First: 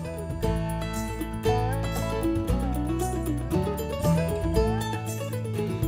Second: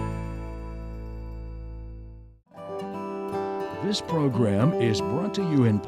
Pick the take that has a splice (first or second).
second